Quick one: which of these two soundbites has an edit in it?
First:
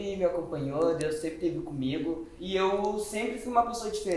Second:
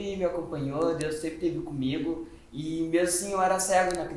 first; 1 cut; at 2.3 s

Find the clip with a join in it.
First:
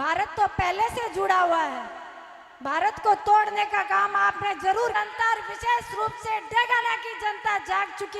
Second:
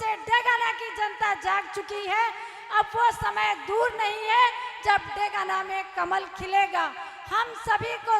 first; 1 cut; at 4.9 s

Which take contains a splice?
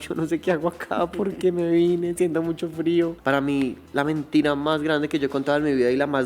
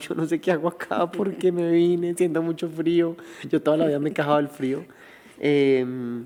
first; 1 cut; at 3.2 s

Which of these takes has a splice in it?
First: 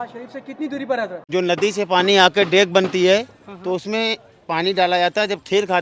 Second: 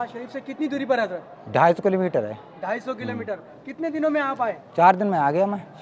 first; 1 cut; at 1.2 s

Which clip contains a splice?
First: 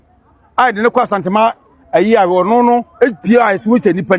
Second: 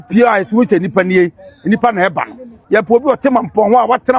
second; 1 cut; at 2.5 s

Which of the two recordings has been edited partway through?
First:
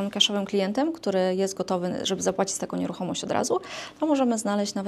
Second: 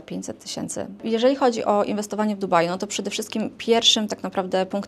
second; 1 cut; at 1.0 s

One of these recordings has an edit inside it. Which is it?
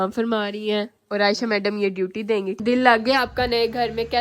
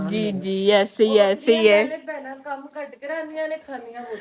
first; 1 cut; at 2.5 s

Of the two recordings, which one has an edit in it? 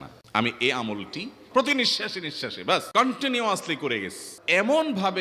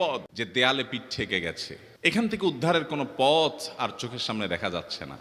first; 3 cuts; at 1.3 s, 2.9 s, 4.4 s

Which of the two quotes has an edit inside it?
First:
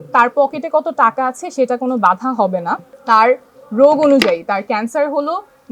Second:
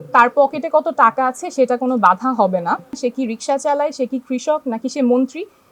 second; 1 cut; at 2.9 s

